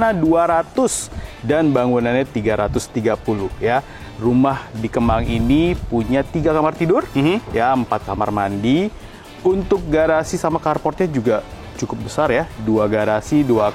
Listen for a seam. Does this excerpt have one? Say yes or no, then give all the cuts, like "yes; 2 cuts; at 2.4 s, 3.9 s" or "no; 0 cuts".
no; 0 cuts